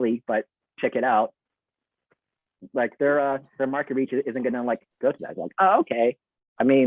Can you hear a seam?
no; 0 cuts

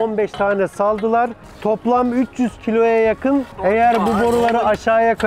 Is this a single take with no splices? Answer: no; 1 cut; at 3.5 s

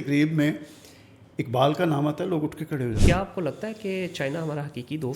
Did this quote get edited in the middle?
yes; 1 cut; at 3.0 s

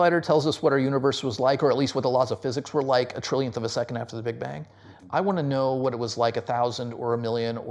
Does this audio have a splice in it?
no; 0 cuts

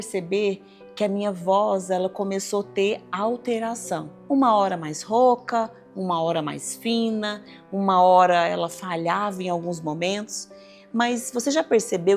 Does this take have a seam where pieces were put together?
yes; 1 cut; at 4.1 s

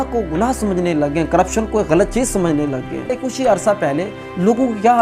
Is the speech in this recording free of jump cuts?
no; 1 cut; at 3.1 s

